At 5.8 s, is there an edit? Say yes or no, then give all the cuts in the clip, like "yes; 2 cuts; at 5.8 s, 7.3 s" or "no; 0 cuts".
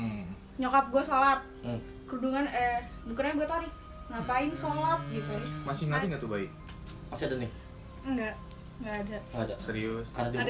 yes; 1 cut; at 5.8 s